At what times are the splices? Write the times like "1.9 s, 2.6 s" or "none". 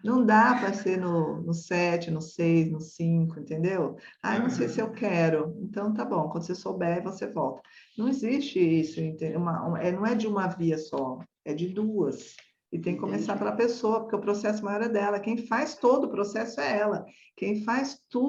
none